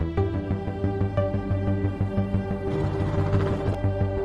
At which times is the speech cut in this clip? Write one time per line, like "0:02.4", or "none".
none